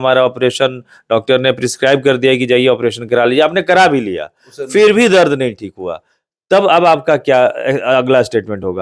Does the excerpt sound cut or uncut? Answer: uncut